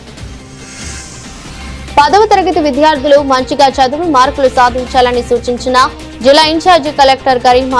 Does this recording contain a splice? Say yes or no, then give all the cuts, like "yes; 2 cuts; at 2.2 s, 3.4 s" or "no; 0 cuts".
yes; 1 cut; at 1.4 s